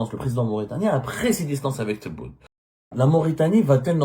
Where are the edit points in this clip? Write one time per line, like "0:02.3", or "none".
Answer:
0:02.8

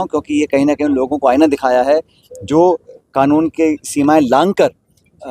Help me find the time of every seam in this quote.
0:02.9

